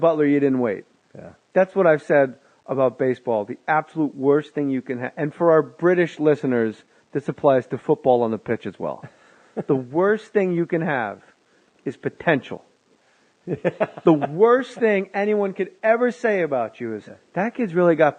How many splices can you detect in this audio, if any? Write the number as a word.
one